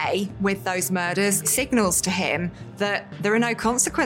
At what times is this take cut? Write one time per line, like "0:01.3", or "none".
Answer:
0:01.5